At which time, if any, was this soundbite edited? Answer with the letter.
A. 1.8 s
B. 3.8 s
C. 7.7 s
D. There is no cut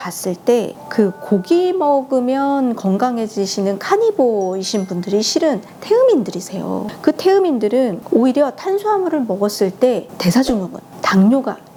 D